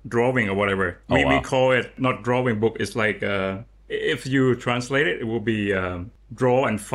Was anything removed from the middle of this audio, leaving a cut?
yes; 1 cut; at 1.9 s

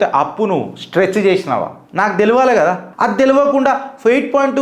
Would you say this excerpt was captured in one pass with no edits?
yes; 0 cuts

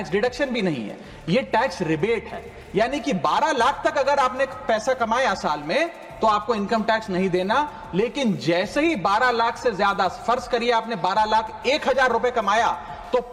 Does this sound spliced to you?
no; 0 cuts

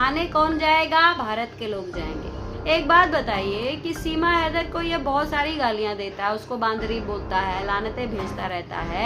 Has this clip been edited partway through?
yes; 1 cut; at 2.4 s

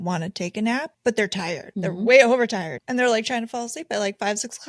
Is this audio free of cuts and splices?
no; 3 cuts; at 0.9 s, 1.7 s, 2.8 s

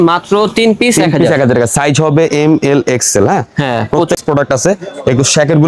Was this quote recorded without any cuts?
no; 1 cut; at 4.2 s

